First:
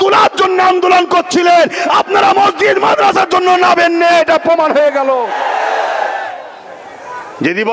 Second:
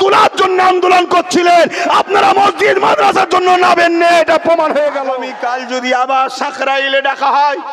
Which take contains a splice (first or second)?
second